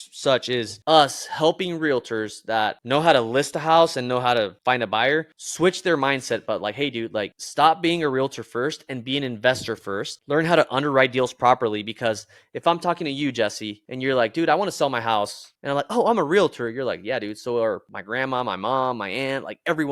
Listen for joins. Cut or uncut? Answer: uncut